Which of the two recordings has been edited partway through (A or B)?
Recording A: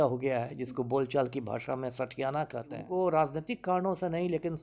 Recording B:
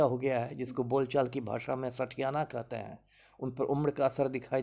A